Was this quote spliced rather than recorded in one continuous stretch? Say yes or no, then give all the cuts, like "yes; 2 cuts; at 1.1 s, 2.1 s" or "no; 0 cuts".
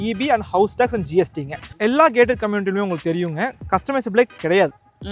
yes; 1 cut; at 1.7 s